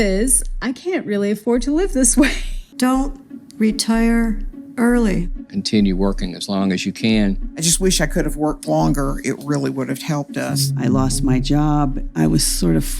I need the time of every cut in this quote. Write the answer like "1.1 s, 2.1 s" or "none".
2.7 s